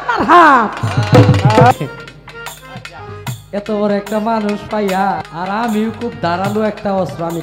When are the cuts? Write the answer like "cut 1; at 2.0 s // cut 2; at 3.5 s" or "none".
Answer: cut 1; at 1.7 s // cut 2; at 5.2 s